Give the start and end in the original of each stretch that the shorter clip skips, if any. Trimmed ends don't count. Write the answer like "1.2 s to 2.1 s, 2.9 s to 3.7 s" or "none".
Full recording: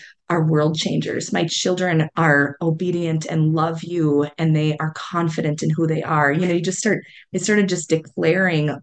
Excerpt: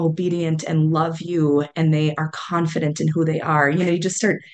none